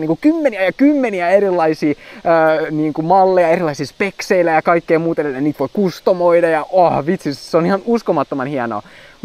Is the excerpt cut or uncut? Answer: uncut